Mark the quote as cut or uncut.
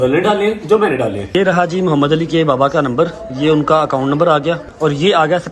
cut